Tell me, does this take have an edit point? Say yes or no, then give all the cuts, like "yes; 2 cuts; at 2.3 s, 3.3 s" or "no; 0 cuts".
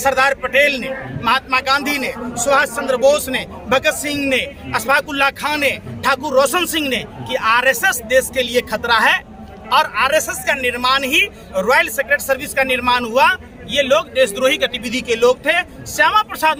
no; 0 cuts